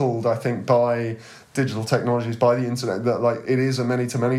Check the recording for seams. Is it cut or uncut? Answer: cut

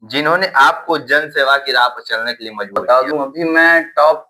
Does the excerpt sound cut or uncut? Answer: cut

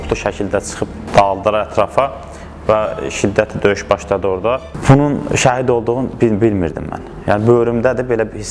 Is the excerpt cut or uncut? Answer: cut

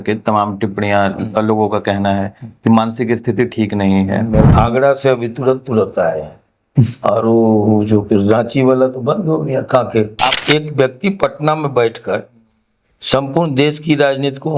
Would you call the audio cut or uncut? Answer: cut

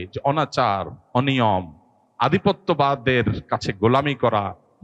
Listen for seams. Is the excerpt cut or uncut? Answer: uncut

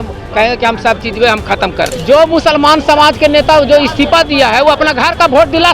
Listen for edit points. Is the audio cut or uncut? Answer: cut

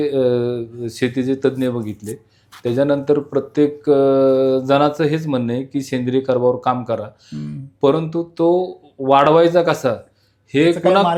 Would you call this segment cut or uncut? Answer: uncut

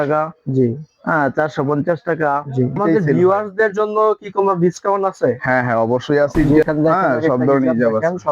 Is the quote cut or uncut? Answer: cut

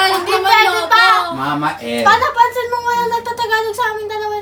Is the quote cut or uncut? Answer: uncut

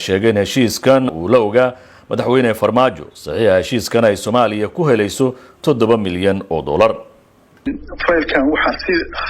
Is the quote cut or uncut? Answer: cut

